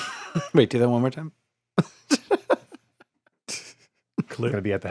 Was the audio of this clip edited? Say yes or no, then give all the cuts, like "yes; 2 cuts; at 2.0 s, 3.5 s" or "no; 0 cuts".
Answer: no; 0 cuts